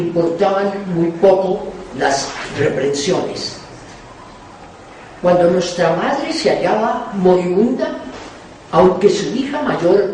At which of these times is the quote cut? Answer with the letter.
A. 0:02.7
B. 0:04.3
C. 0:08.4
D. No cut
C